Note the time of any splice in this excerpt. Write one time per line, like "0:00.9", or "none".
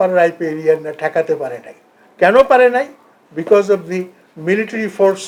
none

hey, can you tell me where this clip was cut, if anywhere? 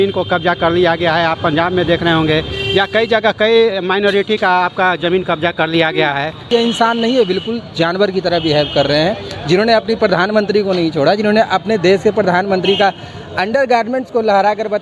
0:06.5

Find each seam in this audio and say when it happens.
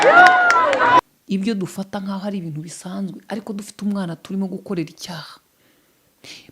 0:01.0

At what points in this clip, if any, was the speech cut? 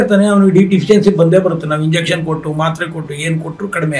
none

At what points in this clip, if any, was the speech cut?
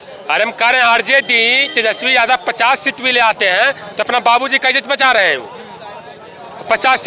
none

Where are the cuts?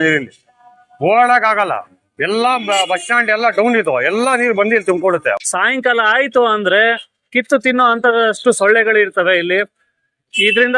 0:05.4

